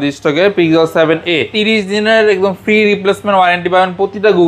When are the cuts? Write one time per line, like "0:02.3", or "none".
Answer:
0:01.5